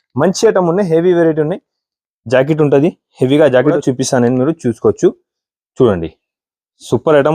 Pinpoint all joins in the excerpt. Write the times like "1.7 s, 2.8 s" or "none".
3.8 s